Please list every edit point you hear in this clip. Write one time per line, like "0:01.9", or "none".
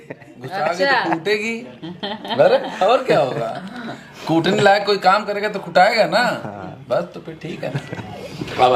none